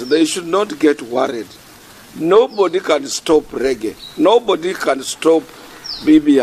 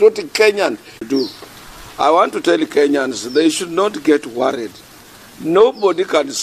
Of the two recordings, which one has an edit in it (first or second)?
second